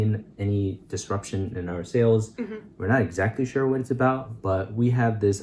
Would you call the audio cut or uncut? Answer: uncut